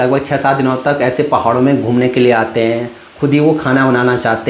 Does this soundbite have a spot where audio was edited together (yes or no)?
no